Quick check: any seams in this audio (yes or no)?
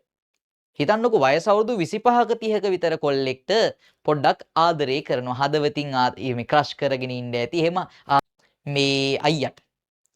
yes